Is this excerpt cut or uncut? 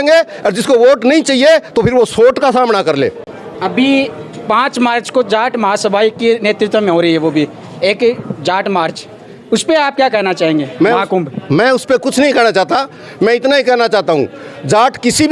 uncut